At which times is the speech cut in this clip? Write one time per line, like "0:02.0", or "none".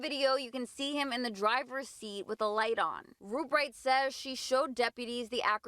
0:03.2